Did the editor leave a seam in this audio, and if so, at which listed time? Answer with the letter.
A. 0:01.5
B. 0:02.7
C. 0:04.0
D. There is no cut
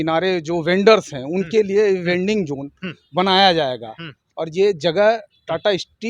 D